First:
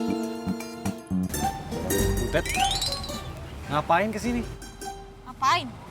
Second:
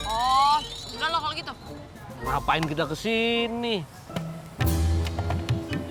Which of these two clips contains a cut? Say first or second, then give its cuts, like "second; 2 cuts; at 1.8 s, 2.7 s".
first; 1 cut; at 1.3 s